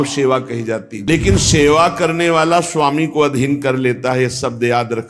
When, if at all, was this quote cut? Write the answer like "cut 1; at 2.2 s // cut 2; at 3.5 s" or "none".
cut 1; at 0.9 s